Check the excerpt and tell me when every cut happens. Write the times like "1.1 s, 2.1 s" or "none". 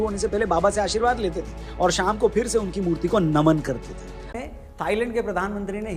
4.3 s